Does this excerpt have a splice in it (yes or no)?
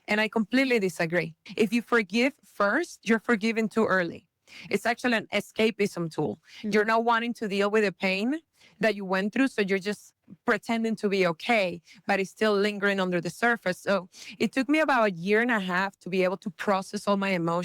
yes